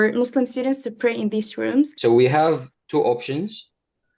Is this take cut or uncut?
cut